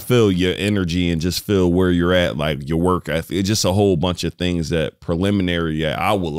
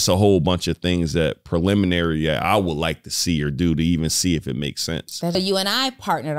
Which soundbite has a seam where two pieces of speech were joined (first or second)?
second